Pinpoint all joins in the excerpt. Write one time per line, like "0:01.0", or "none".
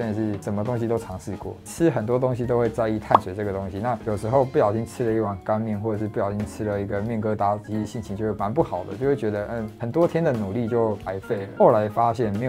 none